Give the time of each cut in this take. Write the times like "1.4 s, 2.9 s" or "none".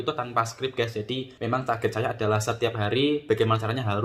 1.3 s